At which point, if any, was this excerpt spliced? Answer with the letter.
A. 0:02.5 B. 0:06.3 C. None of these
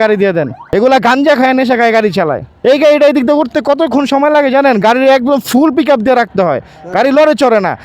A